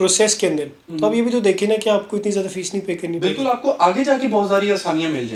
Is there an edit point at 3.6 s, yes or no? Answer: no